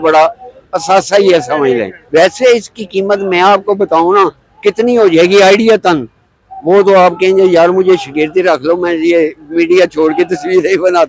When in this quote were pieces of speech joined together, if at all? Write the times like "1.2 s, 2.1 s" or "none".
1.9 s